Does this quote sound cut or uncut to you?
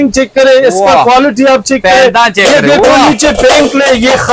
uncut